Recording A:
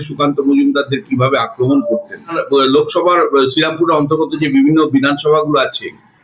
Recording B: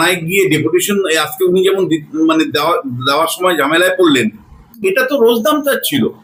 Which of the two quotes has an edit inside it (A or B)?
A